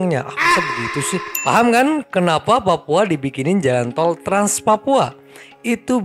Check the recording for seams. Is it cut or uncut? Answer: cut